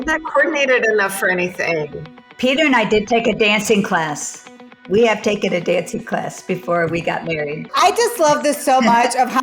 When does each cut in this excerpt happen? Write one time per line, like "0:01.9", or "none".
0:07.2